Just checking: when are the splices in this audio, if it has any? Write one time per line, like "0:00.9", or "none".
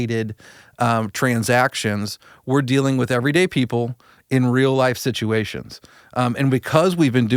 none

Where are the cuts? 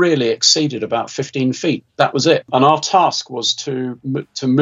0:02.5

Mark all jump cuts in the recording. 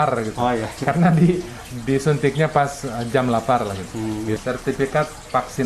0:04.4

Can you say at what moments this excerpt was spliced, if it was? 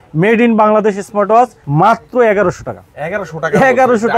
0:01.6

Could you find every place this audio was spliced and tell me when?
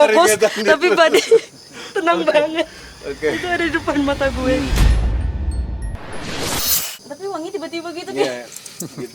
0:04.7
0:06.9

